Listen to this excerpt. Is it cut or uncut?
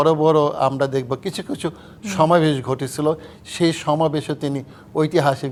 uncut